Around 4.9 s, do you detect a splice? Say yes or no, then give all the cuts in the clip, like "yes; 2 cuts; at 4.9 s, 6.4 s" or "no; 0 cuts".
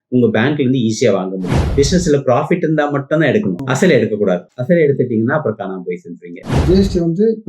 no; 3 cuts; at 1.5 s, 3.6 s, 6.5 s